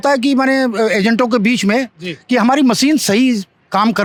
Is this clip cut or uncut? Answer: uncut